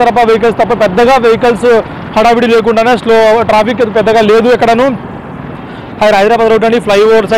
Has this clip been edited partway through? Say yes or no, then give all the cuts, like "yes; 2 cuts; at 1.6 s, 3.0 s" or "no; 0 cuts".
no; 0 cuts